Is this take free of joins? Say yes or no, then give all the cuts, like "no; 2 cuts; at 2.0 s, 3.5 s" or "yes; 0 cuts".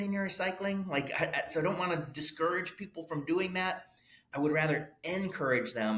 yes; 0 cuts